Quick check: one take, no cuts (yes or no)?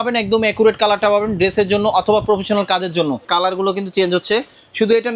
no